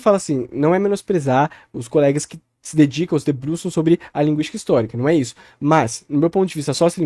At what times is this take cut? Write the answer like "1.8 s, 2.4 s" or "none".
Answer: none